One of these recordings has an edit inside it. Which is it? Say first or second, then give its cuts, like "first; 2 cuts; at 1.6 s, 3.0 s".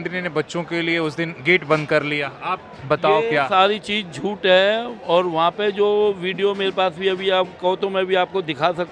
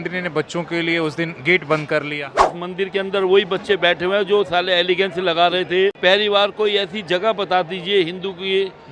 second; 2 cuts; at 2.4 s, 6.0 s